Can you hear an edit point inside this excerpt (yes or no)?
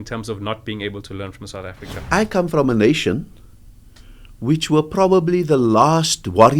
yes